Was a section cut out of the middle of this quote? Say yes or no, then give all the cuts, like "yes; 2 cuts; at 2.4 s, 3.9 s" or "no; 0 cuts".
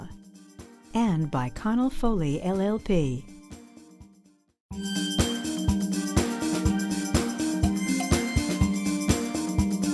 yes; 1 cut; at 4.3 s